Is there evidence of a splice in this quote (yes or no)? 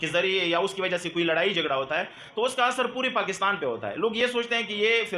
no